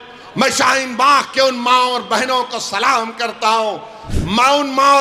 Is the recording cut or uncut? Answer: cut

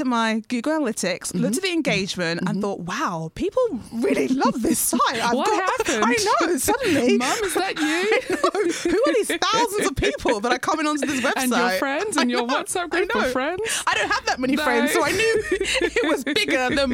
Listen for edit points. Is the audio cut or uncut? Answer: uncut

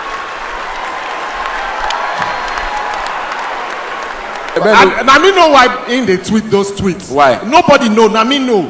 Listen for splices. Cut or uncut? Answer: cut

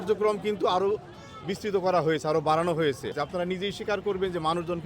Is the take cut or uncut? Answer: cut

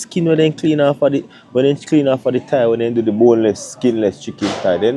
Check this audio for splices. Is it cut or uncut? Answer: uncut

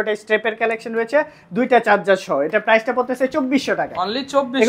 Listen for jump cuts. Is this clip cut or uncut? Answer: uncut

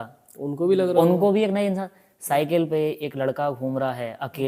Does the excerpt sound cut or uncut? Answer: uncut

